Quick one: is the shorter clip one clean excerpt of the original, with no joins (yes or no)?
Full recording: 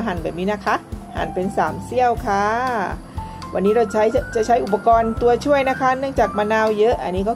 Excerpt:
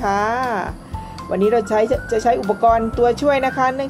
yes